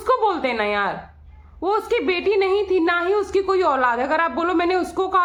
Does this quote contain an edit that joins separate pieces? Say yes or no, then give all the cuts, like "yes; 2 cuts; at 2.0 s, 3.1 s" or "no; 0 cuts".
no; 0 cuts